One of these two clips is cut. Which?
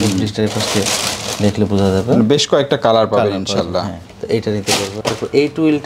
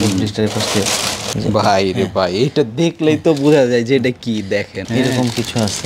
second; 1 cut; at 1.2 s

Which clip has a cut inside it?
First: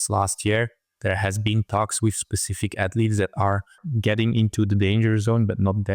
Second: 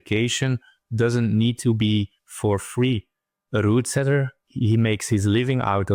first; 1 cut; at 3.8 s

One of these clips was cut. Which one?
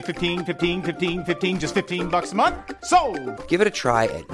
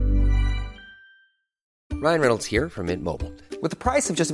second; 1 cut; at 1.7 s

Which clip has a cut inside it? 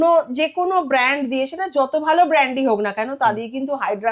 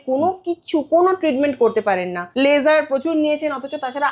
second; 1 cut; at 2.2 s

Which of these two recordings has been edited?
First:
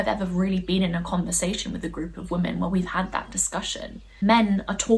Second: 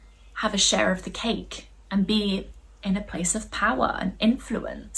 first; 1 cut; at 4.0 s

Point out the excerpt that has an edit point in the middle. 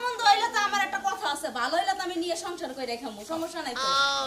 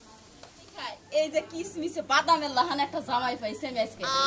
second; 1 cut; at 1.0 s

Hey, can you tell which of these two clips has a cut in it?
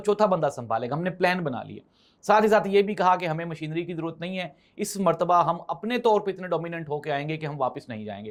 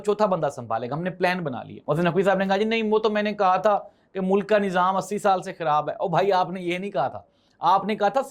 second; 1 cut; at 1.7 s

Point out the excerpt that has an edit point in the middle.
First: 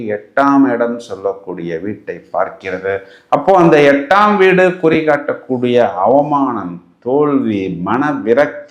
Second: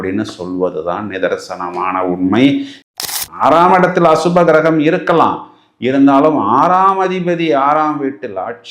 second; 1 cut; at 2.8 s

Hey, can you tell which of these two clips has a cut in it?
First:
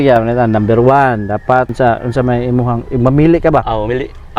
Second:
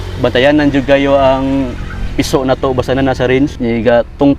first; 1 cut; at 1.7 s

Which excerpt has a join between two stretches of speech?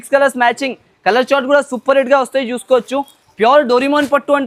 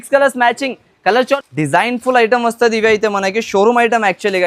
second; 1 cut; at 1.4 s

